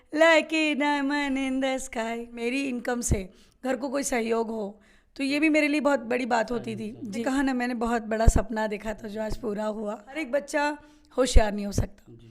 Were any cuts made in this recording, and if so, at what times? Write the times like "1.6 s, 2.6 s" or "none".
2.4 s, 7.2 s, 10.2 s